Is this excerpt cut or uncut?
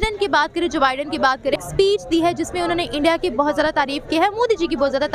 cut